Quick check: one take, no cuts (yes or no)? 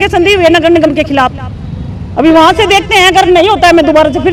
yes